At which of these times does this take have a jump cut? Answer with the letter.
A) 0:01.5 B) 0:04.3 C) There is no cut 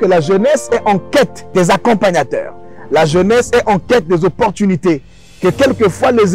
A